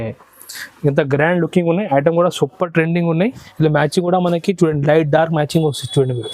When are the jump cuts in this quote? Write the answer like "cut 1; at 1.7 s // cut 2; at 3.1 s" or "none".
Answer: cut 1; at 3.4 s